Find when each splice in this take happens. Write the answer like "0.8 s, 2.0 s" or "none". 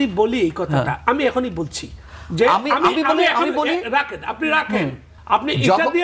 5.1 s